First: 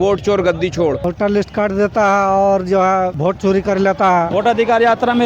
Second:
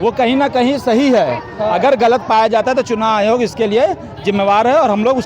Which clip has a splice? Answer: first; 3 cuts; at 1.4 s, 3.2 s, 4.3 s

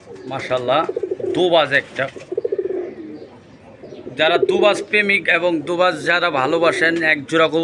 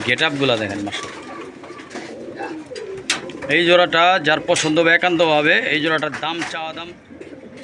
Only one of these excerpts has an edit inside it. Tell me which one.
second; 1 cut; at 6.8 s

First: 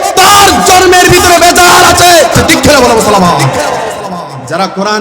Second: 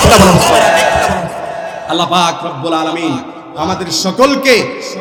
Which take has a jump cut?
first; 1 cut; at 2.4 s

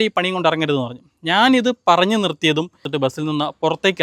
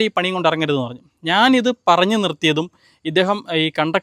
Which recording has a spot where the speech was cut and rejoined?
first; 1 cut; at 2.8 s

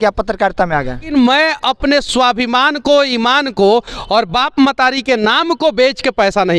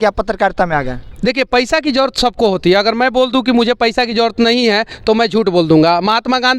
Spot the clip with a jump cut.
first; 1 cut; at 1.1 s

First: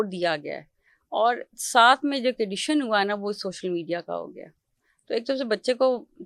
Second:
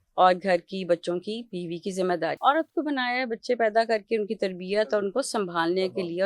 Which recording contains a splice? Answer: second; 1 cut; at 2.4 s

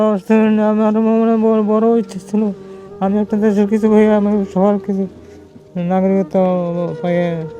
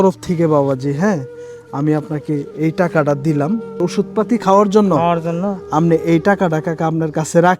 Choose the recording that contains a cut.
second; 1 cut; at 3.7 s

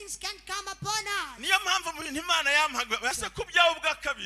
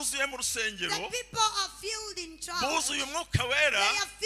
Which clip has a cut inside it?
first; 1 cut; at 3.1 s

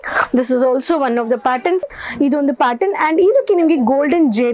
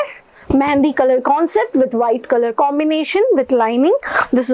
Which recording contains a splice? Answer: first; 1 cut; at 1.9 s

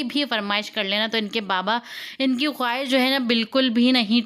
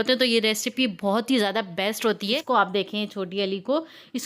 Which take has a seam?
second; 1 cut; at 2.4 s

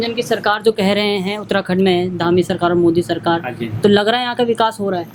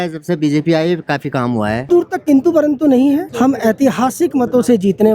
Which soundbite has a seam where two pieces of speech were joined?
second; 2 cuts; at 1.9 s, 3.3 s

